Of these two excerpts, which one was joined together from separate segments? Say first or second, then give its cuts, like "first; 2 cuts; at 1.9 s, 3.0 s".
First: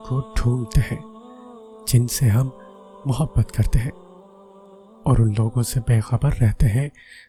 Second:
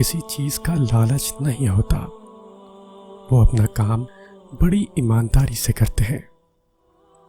second; 1 cut; at 6.2 s